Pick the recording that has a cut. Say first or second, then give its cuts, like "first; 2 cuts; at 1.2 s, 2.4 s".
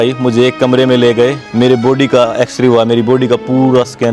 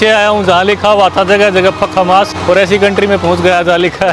first; 1 cut; at 1.4 s